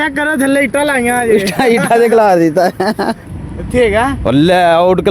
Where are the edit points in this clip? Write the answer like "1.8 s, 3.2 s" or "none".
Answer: 3.3 s